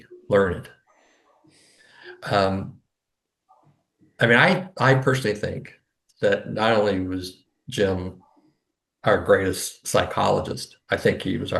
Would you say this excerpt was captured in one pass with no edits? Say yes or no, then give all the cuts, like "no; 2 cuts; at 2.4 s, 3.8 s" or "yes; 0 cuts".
yes; 0 cuts